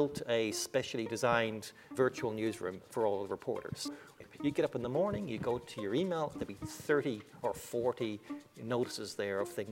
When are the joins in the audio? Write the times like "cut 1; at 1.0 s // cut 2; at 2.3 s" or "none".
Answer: cut 1; at 1.9 s // cut 2; at 3.8 s